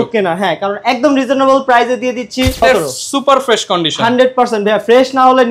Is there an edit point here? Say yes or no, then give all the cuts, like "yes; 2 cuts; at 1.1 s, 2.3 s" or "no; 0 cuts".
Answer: yes; 1 cut; at 2.6 s